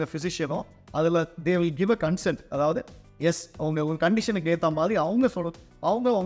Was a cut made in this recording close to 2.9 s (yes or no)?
no